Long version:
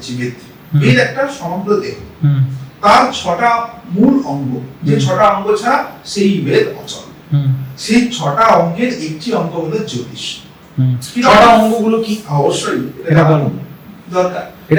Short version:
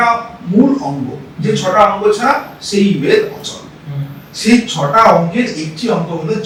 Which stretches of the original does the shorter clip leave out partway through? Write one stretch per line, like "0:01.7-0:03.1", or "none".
none

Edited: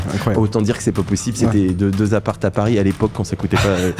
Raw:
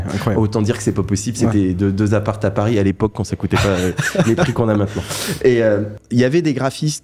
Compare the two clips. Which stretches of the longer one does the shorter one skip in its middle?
none

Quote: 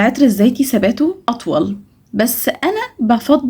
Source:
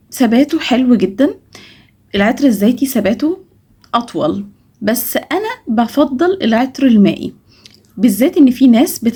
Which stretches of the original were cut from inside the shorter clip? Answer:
0:03.5-0:04.0

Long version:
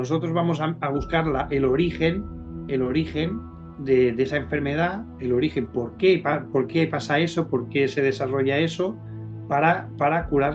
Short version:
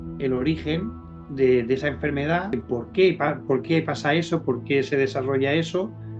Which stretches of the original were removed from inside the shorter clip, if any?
0:05.1-0:05.6

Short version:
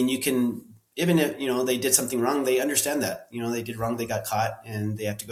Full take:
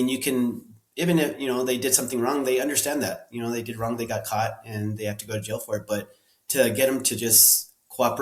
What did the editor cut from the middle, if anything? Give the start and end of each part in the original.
none

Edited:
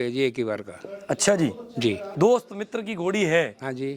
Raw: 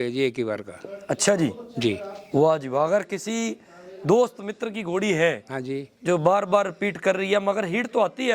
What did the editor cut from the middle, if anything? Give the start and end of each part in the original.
0:02.1-0:03.9

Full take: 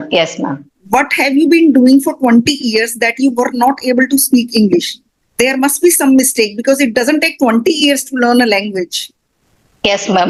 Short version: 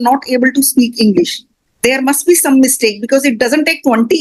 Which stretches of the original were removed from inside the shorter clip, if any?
none

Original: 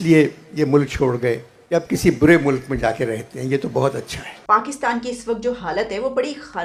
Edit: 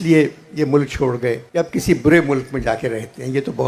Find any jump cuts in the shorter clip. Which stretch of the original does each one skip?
0:01.4-0:01.6

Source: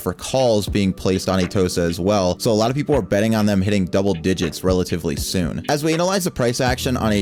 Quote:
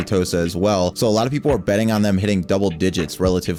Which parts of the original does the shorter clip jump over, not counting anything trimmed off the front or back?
none

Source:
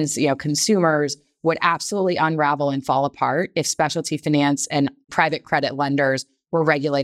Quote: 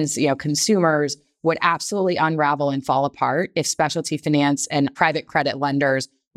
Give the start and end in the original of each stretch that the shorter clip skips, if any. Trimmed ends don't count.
0:04.9-0:05.1

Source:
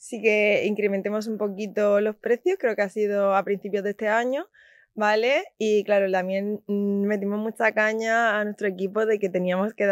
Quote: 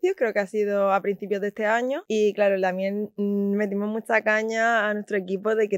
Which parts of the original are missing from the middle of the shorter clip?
0:04.4-0:05.5

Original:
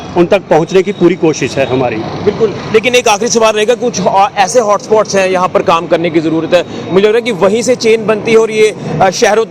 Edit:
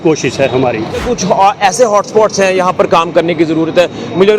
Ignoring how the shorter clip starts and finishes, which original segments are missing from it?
0:02.2-0:03.7

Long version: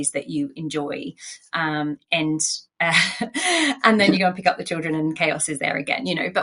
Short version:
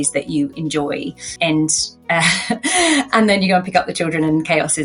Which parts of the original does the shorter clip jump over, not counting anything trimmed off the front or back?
0:01.3-0:02.0

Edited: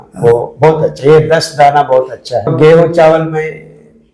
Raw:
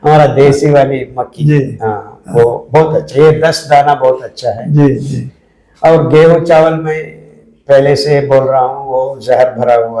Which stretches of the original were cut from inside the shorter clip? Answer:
0:04.6-0:06.0

